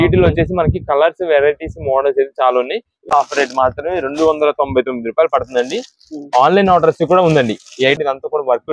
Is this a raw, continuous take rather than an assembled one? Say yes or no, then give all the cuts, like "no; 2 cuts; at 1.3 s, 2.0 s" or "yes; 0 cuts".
no; 2 cuts; at 3.0 s, 8.0 s